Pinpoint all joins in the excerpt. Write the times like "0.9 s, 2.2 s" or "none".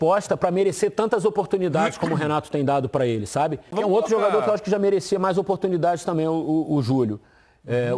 3.7 s